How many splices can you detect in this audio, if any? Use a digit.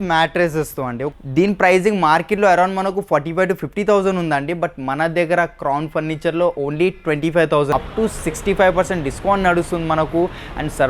2